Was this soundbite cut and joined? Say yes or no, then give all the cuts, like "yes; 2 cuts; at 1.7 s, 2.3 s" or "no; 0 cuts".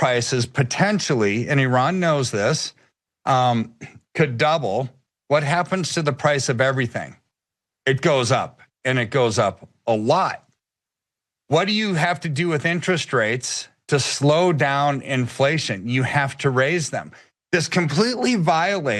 no; 0 cuts